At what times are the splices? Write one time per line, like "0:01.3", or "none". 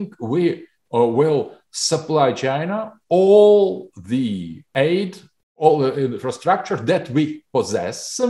0:04.6